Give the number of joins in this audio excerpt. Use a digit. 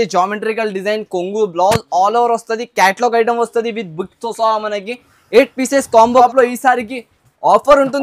1